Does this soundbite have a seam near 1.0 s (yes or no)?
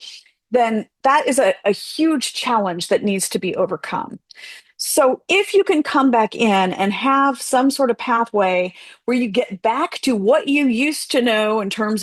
yes